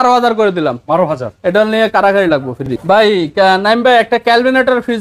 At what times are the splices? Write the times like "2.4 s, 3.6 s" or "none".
none